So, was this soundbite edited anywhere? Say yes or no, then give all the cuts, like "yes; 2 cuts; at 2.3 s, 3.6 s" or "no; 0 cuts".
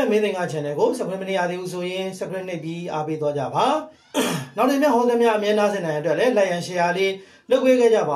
yes; 1 cut; at 4.0 s